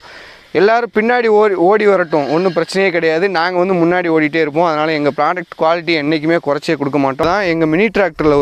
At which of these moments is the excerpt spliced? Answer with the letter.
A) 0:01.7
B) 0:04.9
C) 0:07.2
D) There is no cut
C